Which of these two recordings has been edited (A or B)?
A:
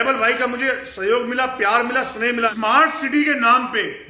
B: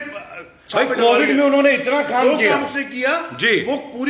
A